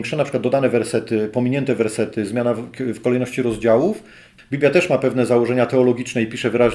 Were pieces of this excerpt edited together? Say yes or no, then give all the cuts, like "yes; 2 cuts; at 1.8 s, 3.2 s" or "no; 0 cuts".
yes; 1 cut; at 4.2 s